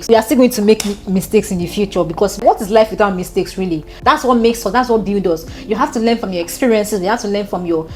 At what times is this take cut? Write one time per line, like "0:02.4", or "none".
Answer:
none